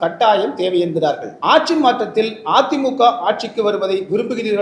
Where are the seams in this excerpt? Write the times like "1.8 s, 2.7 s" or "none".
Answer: 1.3 s